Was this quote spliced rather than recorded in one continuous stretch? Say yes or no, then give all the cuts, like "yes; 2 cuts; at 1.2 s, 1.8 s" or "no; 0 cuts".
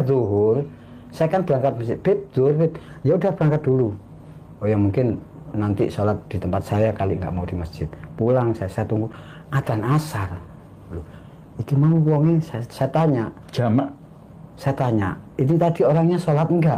no; 0 cuts